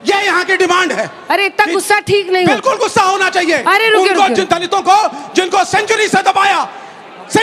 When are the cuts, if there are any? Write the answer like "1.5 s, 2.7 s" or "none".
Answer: none

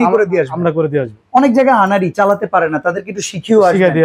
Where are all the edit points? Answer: none

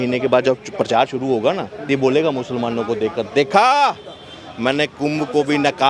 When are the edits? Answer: none

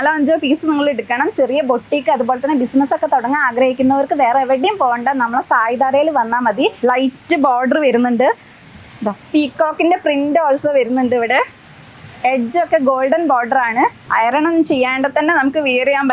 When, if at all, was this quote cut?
6.8 s, 14.1 s

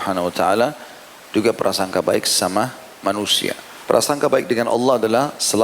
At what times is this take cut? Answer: 3.7 s

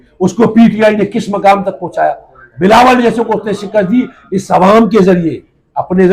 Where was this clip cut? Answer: none

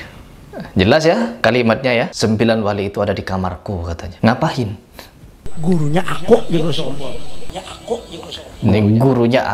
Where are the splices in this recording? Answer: 2.1 s, 4.0 s

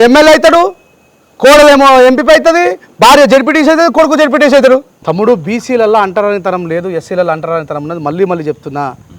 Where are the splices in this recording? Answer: 5.0 s

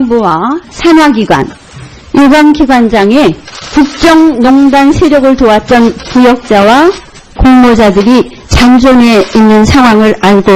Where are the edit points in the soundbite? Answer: 4.8 s

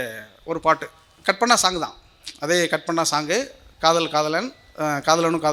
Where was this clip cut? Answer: none

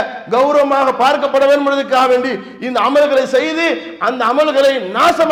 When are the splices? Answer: none

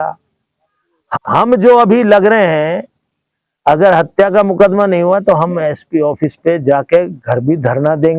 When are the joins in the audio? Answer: 1.2 s

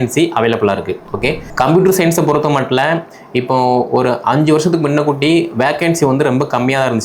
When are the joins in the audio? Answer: 1.4 s

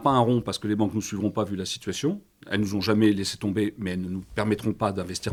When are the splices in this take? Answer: none

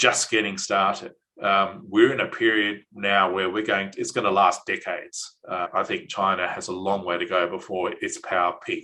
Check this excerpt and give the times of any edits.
5.7 s

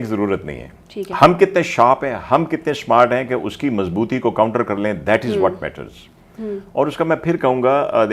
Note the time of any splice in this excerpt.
none

